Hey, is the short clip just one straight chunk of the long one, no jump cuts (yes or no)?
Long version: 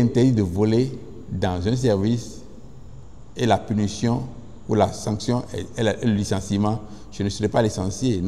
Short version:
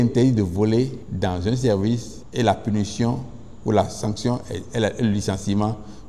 no